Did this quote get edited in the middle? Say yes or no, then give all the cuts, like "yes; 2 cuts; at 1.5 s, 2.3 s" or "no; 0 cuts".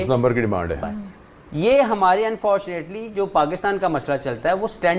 no; 0 cuts